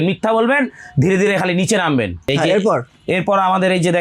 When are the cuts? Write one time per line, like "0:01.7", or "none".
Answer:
none